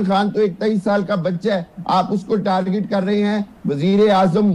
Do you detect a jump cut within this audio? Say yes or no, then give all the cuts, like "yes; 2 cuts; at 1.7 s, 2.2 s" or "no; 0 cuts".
no; 0 cuts